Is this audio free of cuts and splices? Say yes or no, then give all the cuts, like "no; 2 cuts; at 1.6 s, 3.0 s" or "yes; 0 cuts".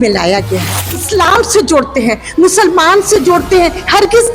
no; 1 cut; at 0.9 s